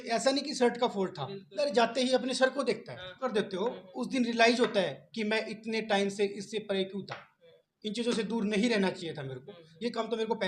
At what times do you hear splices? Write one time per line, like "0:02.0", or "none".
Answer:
0:01.6
0:03.3